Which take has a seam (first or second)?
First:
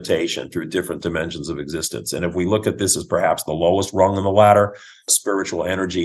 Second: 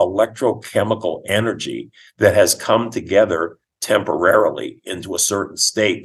first